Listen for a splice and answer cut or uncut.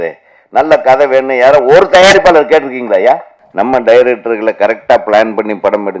cut